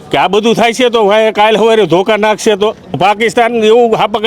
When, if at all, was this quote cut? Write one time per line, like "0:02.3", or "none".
0:03.0